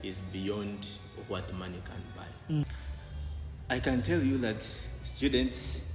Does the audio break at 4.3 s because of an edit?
no; 1 cut; at 2.6 s

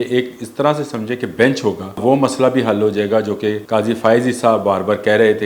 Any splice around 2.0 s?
yes; 2 cuts; at 2.0 s, 3.6 s

